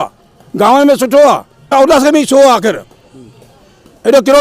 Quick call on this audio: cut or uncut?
cut